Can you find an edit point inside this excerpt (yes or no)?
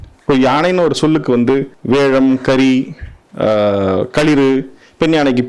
yes